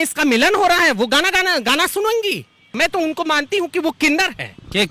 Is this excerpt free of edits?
no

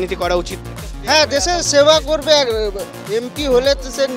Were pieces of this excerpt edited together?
no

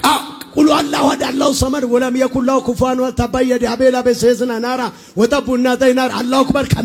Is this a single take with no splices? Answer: yes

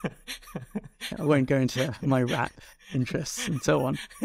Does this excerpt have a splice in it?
no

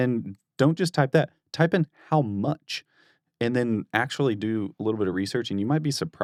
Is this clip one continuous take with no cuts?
yes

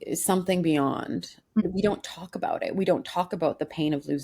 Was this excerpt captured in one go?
no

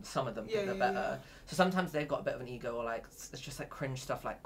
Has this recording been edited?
no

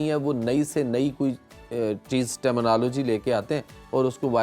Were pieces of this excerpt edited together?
no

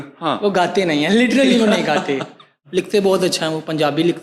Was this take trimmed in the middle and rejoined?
no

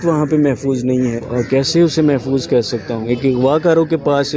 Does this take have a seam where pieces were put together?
yes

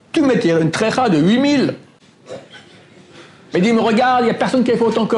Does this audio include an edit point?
no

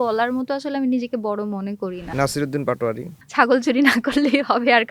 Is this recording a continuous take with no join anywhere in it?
no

